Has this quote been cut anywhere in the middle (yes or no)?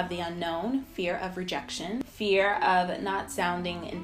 yes